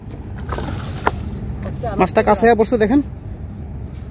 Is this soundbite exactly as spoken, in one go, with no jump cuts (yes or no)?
yes